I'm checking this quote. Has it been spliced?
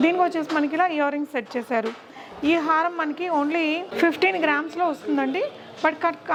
no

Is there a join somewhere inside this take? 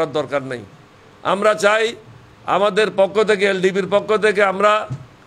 no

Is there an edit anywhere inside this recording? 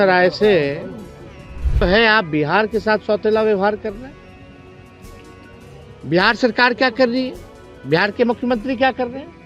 yes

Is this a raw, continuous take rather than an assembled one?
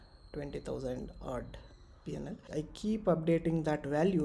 no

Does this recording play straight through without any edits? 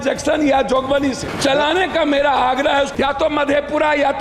no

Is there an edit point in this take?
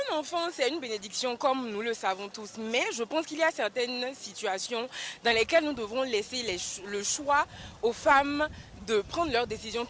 no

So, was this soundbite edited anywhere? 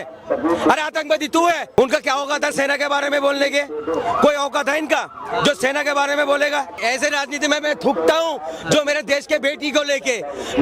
yes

